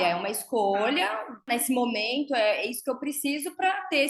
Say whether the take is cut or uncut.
cut